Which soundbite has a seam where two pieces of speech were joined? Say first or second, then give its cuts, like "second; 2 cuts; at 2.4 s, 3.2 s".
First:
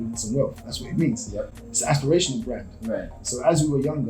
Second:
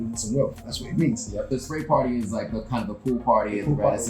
second; 1 cut; at 1.5 s